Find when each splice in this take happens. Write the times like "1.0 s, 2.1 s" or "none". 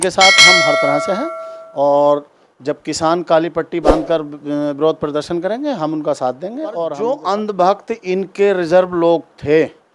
7.0 s